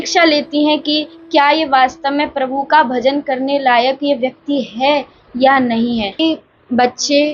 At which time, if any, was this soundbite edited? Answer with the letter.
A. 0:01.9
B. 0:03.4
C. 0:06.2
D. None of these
C